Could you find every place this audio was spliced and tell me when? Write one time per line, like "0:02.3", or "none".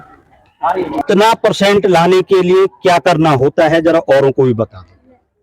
0:01.0